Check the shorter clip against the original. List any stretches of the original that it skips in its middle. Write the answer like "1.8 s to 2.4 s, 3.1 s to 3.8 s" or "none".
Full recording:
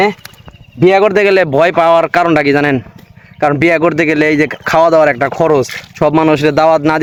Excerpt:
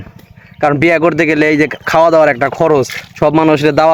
none